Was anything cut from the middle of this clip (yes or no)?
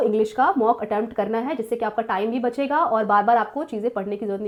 no